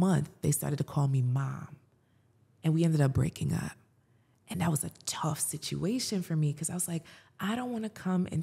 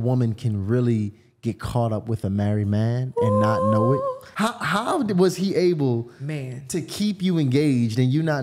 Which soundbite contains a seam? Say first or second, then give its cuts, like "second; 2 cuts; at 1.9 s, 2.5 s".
second; 1 cut; at 4.2 s